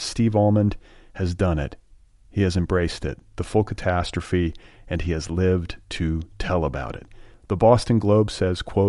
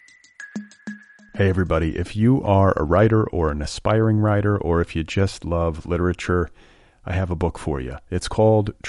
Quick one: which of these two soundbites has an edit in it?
second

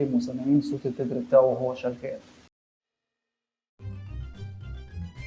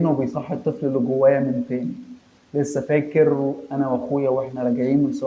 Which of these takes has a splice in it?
first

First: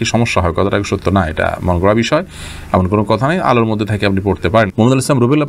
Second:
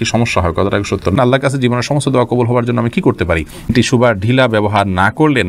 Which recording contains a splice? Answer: second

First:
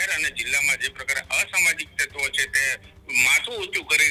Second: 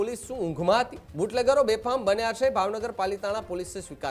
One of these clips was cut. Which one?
second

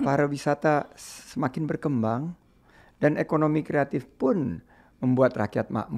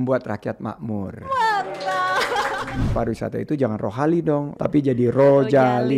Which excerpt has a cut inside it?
second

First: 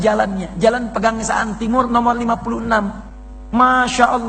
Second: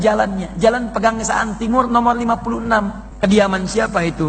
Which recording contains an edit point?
second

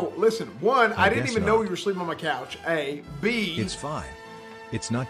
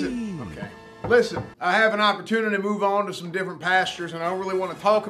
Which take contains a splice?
second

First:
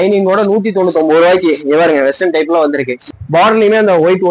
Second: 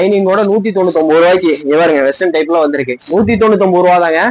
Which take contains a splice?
first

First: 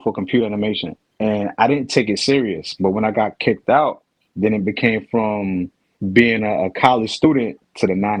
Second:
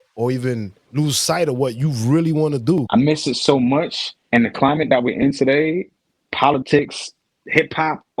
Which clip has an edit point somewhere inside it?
second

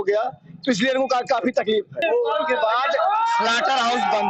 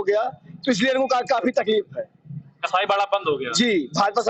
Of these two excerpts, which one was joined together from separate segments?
first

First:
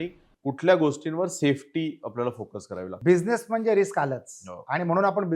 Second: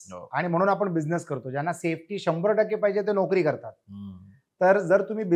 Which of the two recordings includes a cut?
first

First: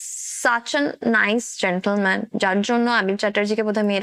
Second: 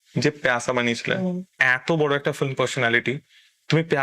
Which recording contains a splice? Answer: second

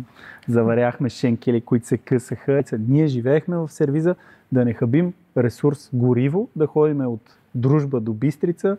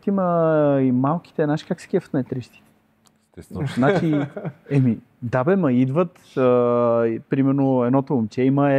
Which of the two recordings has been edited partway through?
first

